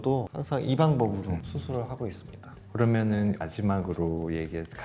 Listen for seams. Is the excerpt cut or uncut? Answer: uncut